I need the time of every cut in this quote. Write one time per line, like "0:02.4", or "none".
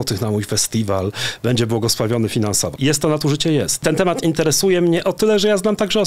0:02.7
0:03.8